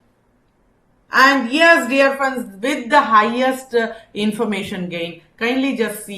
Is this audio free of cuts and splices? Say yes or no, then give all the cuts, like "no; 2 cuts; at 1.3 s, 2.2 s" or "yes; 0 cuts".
no; 1 cut; at 1.1 s